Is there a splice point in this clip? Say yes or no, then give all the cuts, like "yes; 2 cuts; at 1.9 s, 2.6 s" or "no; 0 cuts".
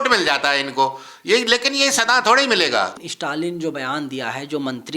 yes; 1 cut; at 2.9 s